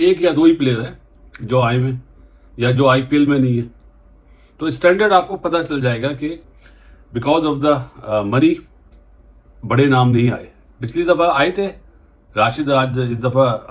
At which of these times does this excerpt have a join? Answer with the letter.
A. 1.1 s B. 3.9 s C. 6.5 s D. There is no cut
D